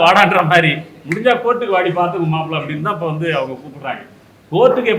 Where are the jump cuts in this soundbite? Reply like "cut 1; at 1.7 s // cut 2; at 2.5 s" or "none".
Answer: none